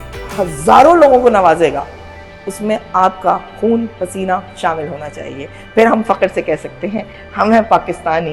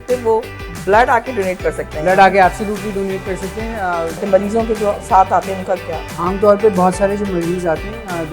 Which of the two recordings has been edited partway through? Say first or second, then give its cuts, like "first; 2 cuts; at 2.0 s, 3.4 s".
second; 1 cut; at 4.2 s